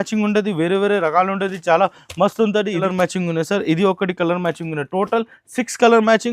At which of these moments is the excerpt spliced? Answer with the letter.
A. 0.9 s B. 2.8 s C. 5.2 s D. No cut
B